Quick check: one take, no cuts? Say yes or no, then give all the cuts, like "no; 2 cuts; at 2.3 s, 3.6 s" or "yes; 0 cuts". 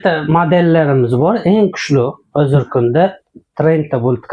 yes; 0 cuts